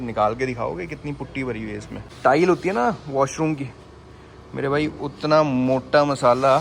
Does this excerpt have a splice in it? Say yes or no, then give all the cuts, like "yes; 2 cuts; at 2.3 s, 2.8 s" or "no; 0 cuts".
yes; 1 cut; at 2.1 s